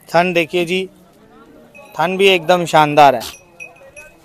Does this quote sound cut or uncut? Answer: uncut